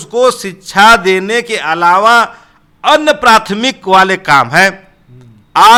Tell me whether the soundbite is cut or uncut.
uncut